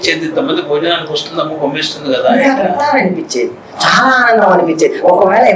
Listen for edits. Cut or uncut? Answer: uncut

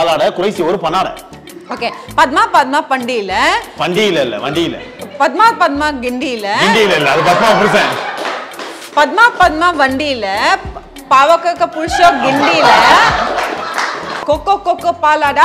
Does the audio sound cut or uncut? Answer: cut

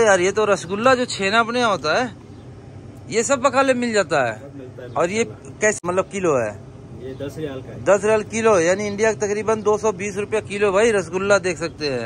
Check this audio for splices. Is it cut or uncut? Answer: uncut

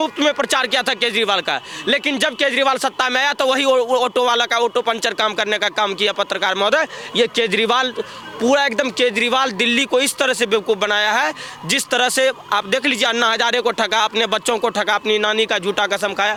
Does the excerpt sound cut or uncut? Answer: uncut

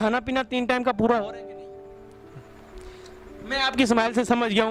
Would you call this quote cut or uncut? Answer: uncut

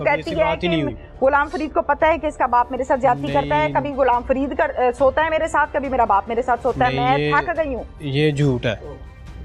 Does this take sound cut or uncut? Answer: uncut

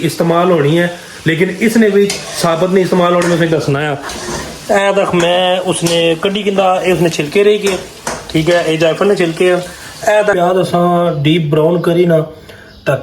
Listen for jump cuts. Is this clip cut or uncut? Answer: cut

